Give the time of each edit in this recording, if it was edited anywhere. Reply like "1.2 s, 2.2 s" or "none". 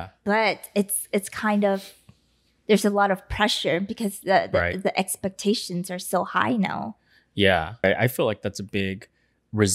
7.8 s